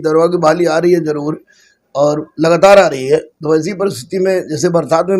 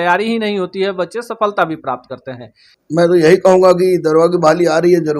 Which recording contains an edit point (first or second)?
second